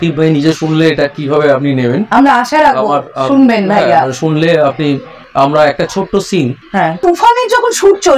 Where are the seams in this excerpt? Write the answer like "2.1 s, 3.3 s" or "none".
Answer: 7.0 s